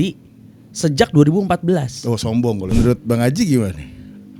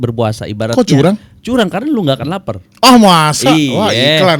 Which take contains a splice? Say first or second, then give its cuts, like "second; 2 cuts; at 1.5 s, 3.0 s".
first; 1 cut; at 2.7 s